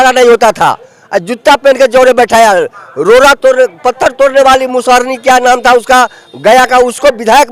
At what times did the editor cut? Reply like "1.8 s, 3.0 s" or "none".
none